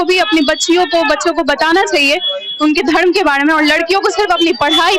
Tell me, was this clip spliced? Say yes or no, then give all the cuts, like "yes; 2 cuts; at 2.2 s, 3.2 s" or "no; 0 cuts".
no; 0 cuts